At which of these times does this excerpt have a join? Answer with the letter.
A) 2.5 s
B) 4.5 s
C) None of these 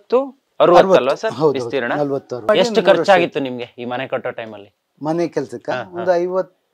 A